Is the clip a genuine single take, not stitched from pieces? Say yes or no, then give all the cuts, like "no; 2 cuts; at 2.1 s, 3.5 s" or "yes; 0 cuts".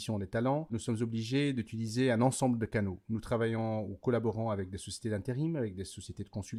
yes; 0 cuts